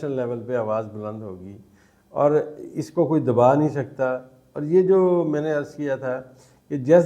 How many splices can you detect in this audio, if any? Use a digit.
0